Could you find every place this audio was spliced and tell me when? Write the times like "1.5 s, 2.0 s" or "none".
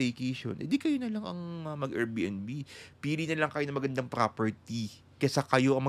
5.0 s